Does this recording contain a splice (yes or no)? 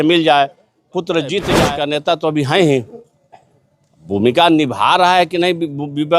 yes